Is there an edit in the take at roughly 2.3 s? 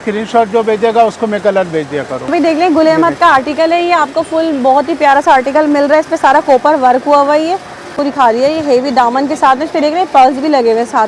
yes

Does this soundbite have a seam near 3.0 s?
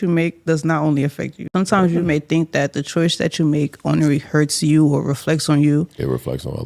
no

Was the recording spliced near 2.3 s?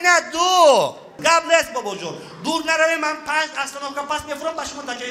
no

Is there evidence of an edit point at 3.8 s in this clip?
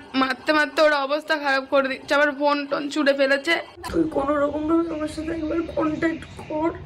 yes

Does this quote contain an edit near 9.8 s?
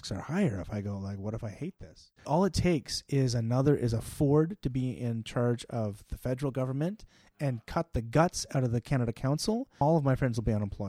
no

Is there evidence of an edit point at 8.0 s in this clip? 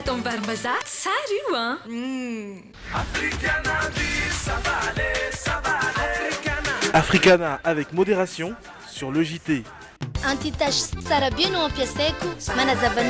no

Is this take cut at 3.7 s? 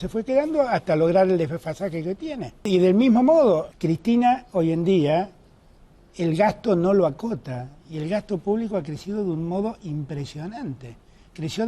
yes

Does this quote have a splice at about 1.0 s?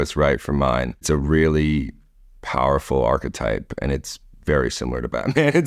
yes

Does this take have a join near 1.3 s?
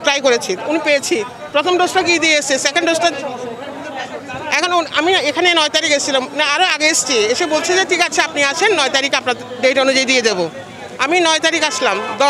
no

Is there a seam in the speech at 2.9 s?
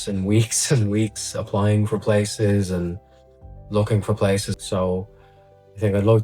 no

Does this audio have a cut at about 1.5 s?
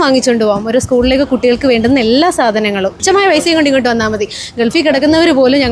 no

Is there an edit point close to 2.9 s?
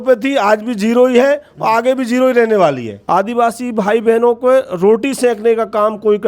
yes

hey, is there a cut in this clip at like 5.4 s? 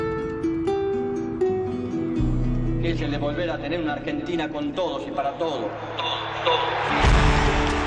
no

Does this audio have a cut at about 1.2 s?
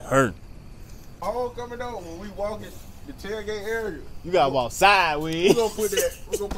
yes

